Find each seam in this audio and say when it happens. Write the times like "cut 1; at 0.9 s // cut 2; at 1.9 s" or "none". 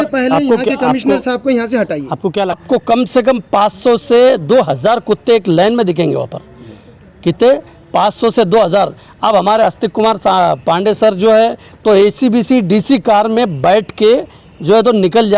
cut 1; at 2.6 s